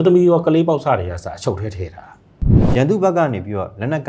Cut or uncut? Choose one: cut